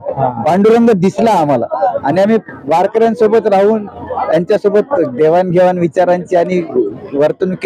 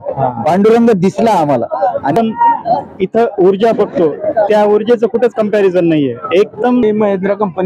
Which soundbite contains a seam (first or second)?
second